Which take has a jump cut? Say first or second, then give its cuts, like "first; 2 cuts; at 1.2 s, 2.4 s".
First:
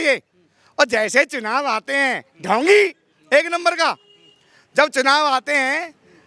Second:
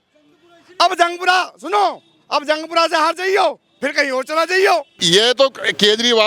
second; 1 cut; at 4.9 s